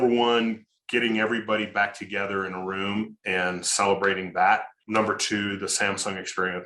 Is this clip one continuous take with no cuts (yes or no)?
no